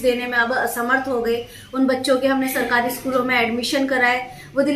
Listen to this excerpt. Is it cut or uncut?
uncut